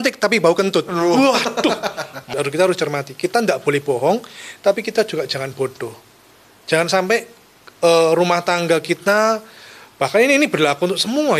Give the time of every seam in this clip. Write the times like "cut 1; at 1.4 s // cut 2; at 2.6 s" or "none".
cut 1; at 2.1 s